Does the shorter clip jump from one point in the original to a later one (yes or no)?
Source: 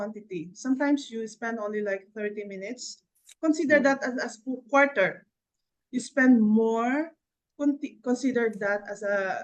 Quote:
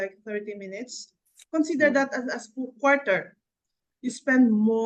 no